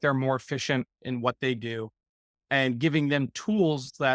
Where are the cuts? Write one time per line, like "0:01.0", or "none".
none